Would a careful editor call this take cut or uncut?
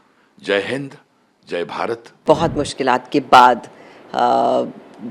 cut